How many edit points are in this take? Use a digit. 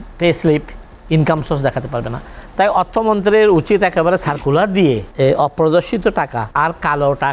2